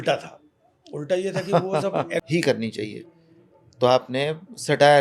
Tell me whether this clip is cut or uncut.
cut